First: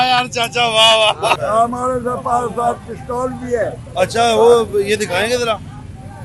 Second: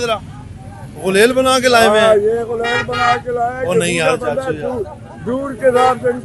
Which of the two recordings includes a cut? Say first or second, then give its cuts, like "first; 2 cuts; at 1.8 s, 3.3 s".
first; 1 cut; at 1.4 s